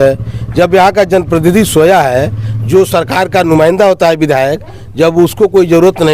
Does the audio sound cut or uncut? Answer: uncut